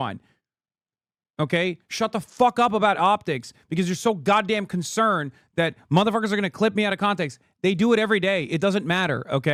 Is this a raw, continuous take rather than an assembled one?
yes; 0 cuts

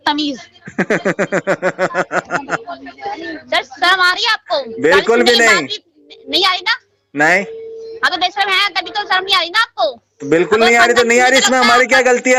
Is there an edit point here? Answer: no; 0 cuts

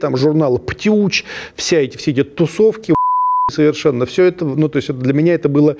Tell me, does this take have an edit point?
no; 0 cuts

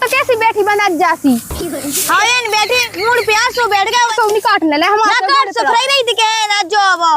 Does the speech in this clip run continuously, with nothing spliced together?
no; 1 cut; at 4.1 s

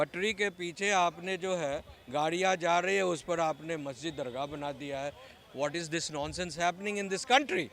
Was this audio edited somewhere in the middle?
no; 0 cuts

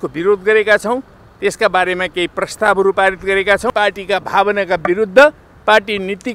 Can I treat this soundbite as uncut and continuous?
no; 1 cut; at 3.7 s

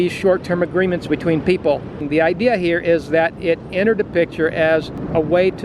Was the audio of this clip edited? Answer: yes; 1 cut; at 2.0 s

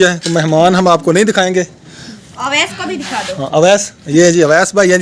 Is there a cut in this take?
yes; 2 cuts; at 2.2 s, 4.0 s

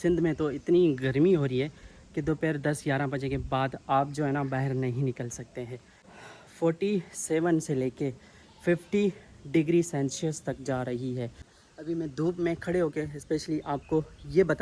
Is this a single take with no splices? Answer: no; 2 cuts; at 6.0 s, 11.4 s

